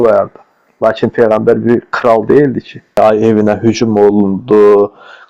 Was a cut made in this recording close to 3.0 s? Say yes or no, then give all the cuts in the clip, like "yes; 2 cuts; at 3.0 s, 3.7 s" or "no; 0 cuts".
yes; 1 cut; at 3.0 s